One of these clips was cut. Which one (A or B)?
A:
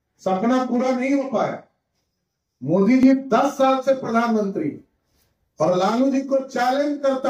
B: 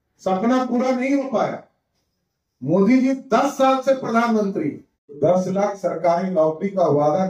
B